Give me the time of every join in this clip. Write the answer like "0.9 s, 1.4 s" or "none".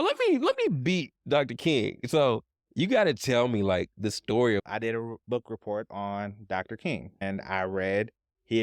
4.6 s, 7.2 s